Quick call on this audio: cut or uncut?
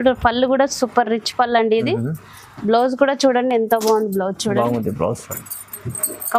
uncut